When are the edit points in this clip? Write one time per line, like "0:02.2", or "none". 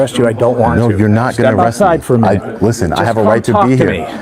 none